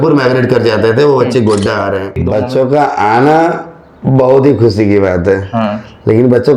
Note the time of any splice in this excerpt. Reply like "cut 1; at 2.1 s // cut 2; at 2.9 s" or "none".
cut 1; at 2.2 s

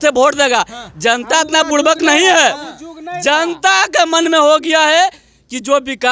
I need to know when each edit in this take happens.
none

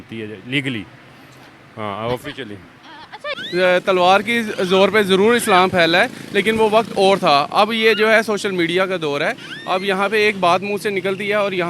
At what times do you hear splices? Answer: cut 1; at 3.3 s

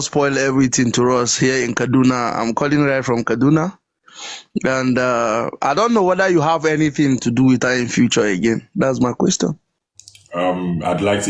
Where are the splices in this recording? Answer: none

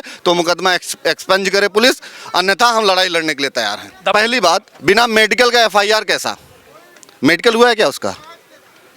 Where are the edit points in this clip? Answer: cut 1; at 4.1 s

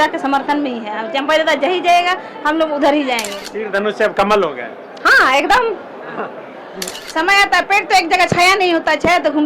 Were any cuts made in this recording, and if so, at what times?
cut 1; at 3.4 s // cut 2; at 7.0 s

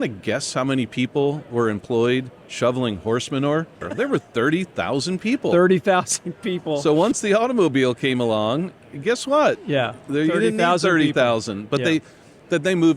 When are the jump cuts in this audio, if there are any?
cut 1; at 3.8 s // cut 2; at 7.1 s

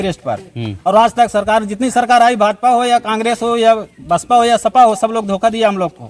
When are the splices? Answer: none

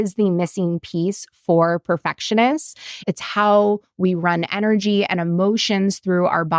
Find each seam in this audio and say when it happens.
cut 1; at 2.9 s

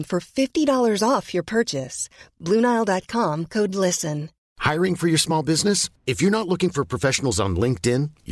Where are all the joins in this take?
none

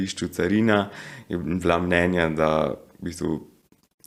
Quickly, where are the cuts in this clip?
none

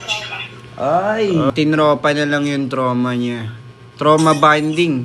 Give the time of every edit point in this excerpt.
cut 1; at 1.5 s

